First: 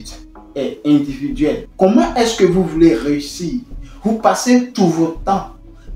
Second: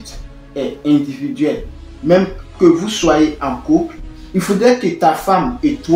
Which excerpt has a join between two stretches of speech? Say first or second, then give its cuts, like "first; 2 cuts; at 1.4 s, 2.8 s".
first; 1 cut; at 1.7 s